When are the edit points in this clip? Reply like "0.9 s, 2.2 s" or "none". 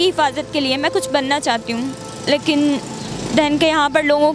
none